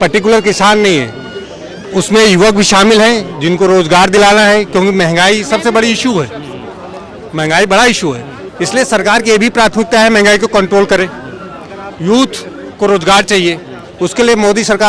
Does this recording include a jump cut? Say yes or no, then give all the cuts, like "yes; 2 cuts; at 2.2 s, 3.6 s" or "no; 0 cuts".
no; 0 cuts